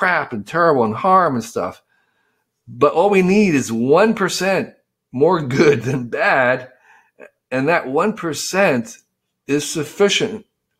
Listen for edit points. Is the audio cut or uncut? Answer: uncut